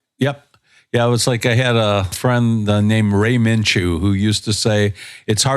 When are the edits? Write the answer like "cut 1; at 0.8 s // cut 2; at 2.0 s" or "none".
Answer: cut 1; at 2.1 s